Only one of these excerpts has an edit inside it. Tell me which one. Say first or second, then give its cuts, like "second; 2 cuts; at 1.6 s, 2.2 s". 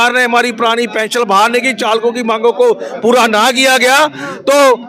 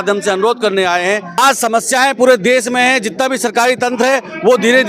second; 1 cut; at 1.4 s